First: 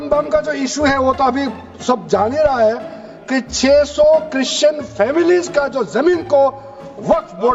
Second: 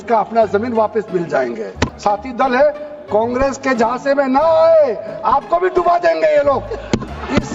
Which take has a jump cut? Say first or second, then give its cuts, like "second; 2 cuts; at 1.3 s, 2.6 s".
second; 1 cut; at 1.9 s